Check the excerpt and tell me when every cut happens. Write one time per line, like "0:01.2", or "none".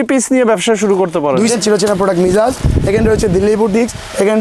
0:01.5